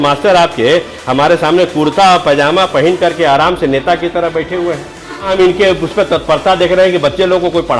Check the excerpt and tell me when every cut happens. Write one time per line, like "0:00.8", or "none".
0:05.3